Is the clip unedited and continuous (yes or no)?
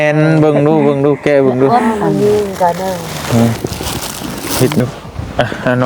no